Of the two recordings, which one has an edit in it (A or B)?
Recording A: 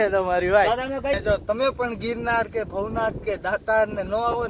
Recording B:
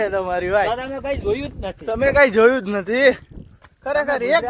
A